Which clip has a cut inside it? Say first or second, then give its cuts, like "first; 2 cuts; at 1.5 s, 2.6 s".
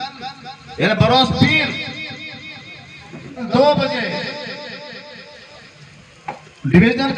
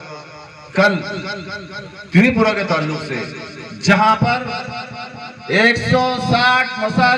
first; 1 cut; at 3.5 s